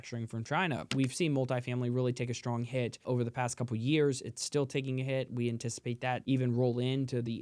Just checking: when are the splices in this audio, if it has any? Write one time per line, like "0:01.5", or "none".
0:00.9
0:03.0
0:06.2